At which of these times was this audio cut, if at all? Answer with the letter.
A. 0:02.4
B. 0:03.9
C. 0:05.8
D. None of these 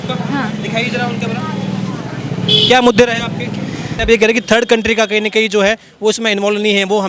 D